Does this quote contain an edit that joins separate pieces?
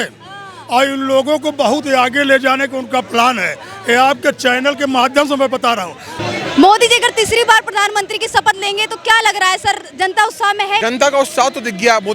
yes; 2 cuts; at 6.1 s, 10.8 s

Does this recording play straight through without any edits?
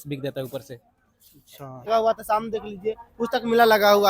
no; 1 cut; at 1.9 s

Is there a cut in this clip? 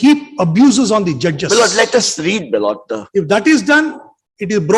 no; 0 cuts

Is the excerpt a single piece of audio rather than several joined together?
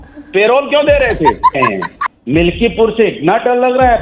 no; 1 cut; at 1.6 s

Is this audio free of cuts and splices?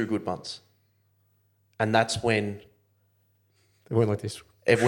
yes; 0 cuts

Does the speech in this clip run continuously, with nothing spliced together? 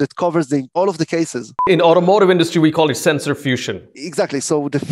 no; 2 cuts; at 1.0 s, 3.9 s

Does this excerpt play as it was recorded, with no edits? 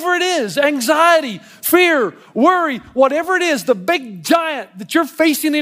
yes; 0 cuts

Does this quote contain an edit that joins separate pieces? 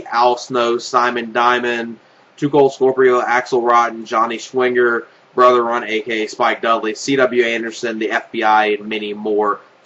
yes; 1 cut; at 7.0 s

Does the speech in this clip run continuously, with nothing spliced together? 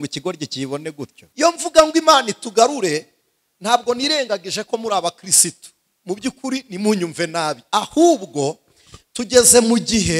no; 1 cut; at 1.2 s

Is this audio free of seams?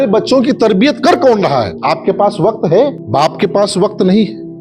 yes; 0 cuts

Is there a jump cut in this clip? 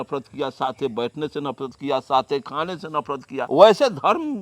yes; 1 cut; at 3.5 s

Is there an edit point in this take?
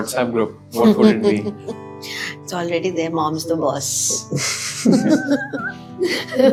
no; 0 cuts

